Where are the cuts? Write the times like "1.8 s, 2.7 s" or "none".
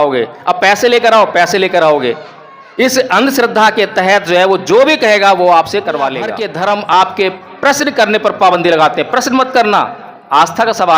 6.4 s